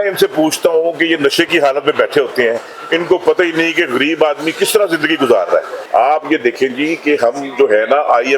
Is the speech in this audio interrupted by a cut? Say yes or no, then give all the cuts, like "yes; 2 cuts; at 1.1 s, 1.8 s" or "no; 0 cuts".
yes; 1 cut; at 5.8 s